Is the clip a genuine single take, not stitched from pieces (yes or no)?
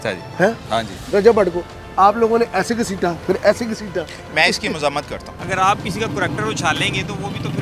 no